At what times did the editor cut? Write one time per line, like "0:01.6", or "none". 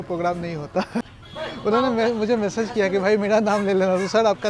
0:01.2